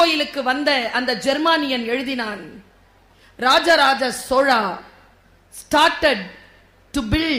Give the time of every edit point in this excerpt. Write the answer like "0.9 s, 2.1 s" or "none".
none